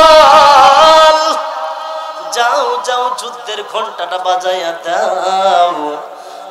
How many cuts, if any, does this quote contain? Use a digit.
0